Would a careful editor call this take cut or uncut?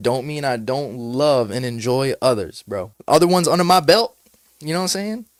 uncut